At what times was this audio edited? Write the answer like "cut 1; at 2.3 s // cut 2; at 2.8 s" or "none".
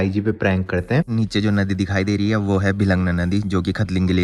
cut 1; at 1.1 s